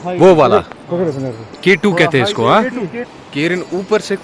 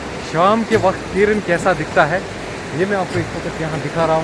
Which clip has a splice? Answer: first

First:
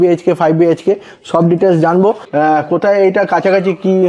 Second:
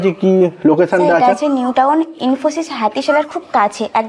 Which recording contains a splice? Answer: first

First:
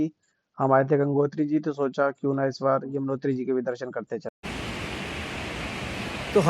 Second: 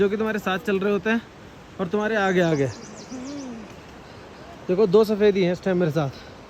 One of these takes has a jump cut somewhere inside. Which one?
first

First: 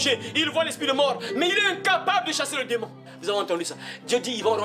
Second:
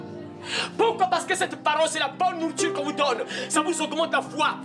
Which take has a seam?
first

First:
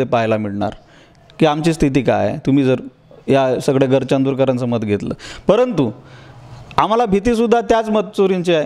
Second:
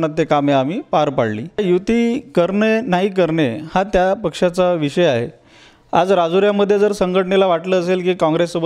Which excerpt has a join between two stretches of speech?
second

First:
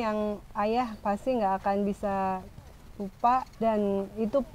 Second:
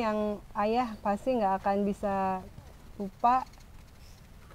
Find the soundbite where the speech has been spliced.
first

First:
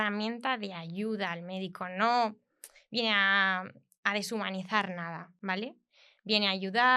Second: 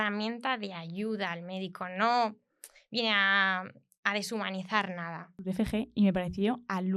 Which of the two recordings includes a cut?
second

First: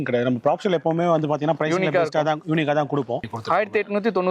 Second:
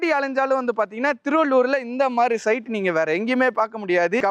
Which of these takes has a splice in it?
first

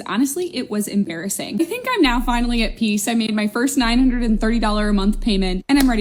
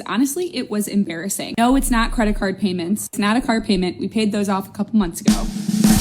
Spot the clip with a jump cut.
second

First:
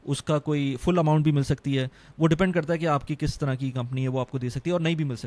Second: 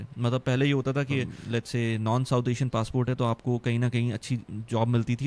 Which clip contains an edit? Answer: second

